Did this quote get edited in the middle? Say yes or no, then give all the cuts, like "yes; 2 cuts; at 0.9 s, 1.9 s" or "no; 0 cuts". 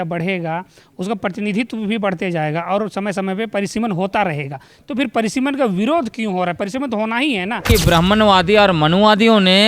yes; 1 cut; at 7.6 s